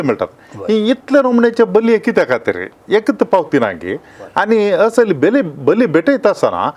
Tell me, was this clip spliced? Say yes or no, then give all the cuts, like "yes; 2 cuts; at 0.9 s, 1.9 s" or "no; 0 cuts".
no; 0 cuts